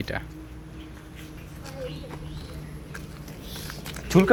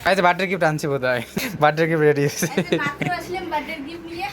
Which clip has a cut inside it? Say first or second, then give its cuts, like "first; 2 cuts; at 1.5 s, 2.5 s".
second; 1 cut; at 1.3 s